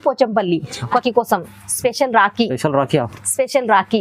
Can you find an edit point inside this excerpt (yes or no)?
yes